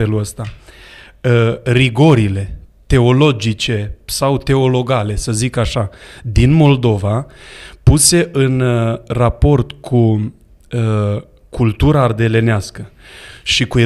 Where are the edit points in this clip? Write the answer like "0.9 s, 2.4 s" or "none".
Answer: none